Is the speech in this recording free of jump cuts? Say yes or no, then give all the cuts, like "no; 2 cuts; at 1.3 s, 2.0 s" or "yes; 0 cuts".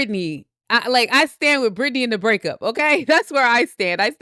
yes; 0 cuts